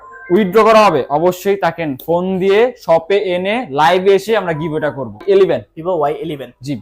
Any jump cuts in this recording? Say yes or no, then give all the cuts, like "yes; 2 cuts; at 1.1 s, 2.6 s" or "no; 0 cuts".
yes; 1 cut; at 5.2 s